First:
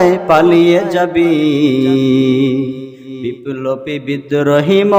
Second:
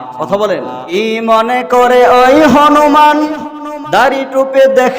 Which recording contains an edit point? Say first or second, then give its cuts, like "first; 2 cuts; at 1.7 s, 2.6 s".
second; 1 cut; at 0.9 s